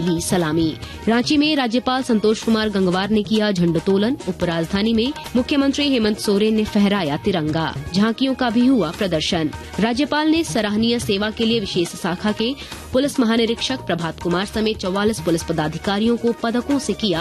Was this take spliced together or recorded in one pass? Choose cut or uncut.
cut